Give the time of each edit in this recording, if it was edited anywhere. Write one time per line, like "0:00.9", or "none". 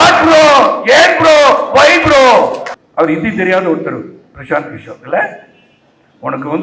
0:03.0